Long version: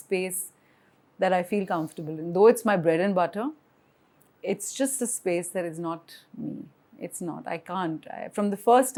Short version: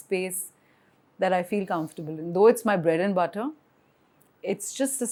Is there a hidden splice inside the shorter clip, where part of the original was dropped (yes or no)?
no